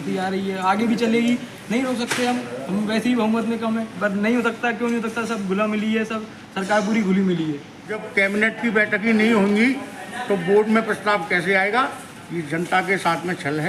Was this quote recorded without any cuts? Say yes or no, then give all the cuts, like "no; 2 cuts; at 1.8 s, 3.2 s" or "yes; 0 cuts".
no; 2 cuts; at 4.0 s, 8.0 s